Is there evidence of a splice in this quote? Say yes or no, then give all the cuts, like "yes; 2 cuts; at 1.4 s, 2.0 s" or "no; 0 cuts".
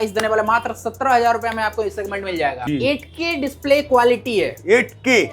yes; 1 cut; at 2.6 s